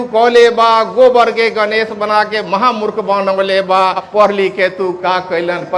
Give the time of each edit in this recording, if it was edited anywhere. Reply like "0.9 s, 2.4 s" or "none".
4.0 s